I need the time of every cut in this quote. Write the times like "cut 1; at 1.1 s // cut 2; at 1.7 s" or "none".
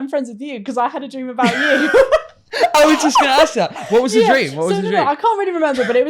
none